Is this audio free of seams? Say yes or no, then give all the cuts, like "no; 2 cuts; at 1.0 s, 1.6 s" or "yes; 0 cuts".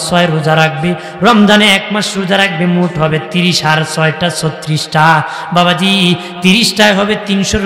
yes; 0 cuts